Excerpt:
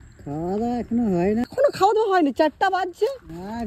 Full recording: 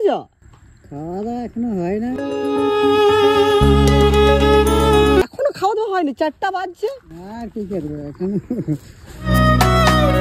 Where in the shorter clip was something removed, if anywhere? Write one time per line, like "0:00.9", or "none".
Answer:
0:01.5